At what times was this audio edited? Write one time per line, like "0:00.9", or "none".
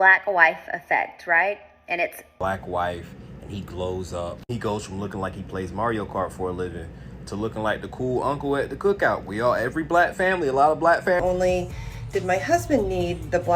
0:02.2
0:11.2